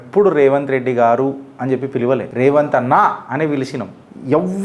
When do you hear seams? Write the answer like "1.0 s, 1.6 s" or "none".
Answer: 2.3 s